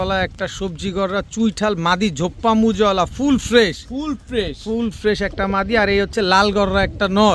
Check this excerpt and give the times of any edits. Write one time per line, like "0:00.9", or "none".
none

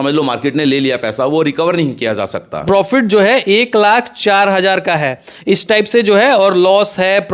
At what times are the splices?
0:02.6

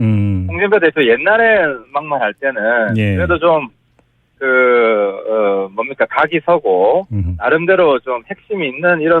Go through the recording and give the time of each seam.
0:02.0

